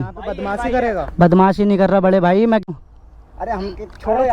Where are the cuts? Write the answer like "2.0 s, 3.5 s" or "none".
2.7 s